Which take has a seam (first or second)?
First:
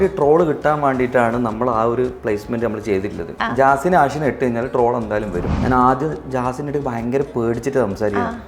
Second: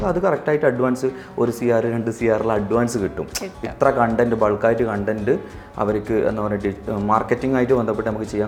first